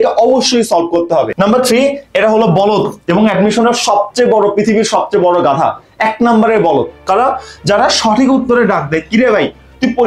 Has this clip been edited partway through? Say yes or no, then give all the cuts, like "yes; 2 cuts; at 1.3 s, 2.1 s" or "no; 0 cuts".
yes; 1 cut; at 1.3 s